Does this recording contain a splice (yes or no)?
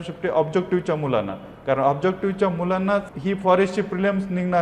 yes